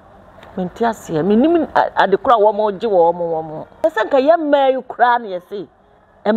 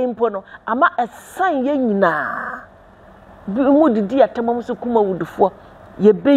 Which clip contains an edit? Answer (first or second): first